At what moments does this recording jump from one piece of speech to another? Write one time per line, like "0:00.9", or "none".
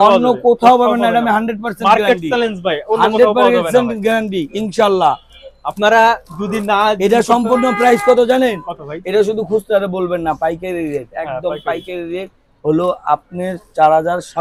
none